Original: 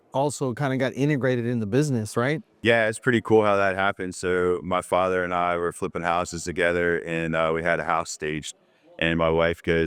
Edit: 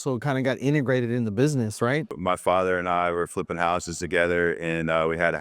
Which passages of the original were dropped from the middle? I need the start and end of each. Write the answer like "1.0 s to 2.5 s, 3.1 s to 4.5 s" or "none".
2.5 s to 4.6 s